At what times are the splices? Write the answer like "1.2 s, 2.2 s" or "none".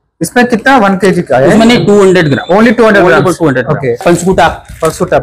4.0 s